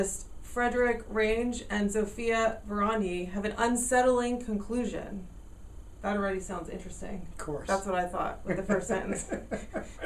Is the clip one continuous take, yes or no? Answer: no